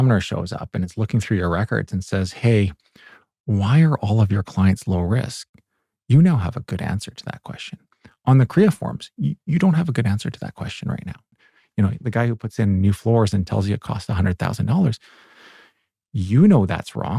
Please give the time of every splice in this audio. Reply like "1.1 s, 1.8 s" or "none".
11.3 s